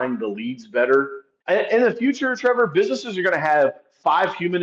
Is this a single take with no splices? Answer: no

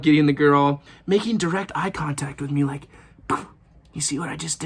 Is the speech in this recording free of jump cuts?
no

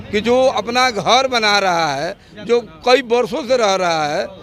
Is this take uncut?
yes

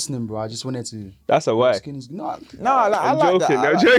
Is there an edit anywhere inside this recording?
no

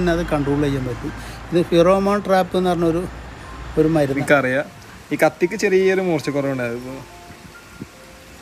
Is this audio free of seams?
no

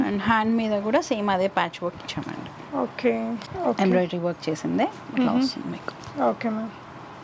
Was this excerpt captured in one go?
yes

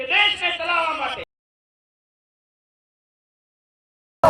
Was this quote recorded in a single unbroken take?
yes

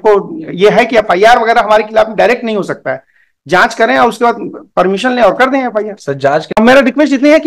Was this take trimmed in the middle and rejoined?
yes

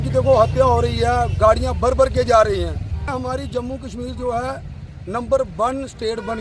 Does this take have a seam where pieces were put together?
yes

